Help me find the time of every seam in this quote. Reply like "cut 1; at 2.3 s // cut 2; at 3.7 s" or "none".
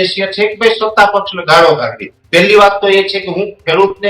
cut 1; at 2.2 s